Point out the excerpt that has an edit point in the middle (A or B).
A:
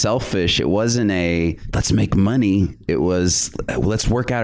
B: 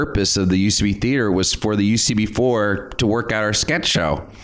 A